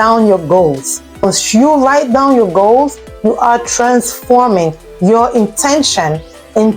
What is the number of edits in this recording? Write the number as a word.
one